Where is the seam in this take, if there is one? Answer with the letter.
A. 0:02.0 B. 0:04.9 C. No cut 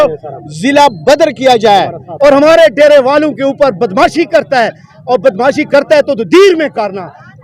A